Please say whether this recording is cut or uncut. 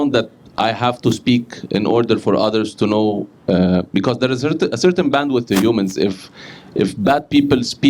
uncut